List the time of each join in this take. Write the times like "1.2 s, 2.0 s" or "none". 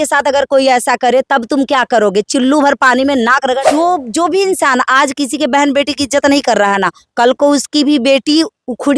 3.6 s